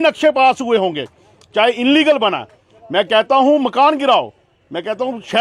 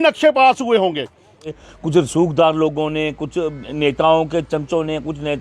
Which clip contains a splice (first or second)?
second